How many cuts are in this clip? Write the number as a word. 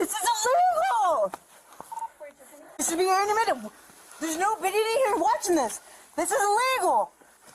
one